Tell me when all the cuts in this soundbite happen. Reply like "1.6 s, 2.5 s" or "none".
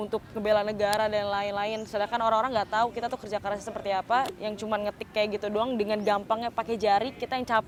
none